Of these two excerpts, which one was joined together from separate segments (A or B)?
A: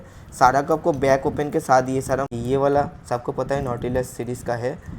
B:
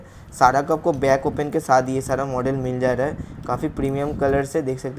A